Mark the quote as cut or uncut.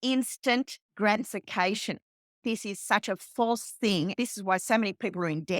cut